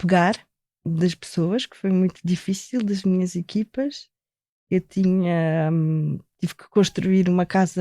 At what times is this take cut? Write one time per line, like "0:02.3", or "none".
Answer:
none